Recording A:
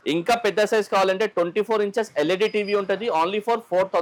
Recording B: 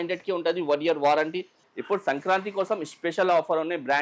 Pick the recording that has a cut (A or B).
B